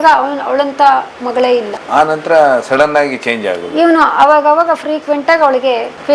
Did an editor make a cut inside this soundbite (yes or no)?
no